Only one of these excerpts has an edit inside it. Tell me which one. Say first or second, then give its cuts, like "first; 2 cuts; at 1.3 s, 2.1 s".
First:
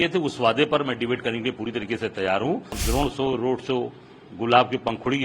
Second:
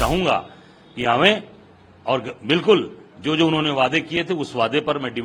first; 1 cut; at 2.8 s